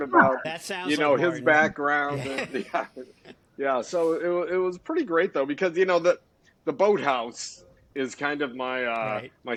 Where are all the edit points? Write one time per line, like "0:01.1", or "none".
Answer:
none